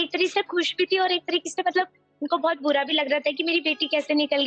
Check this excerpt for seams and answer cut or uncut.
uncut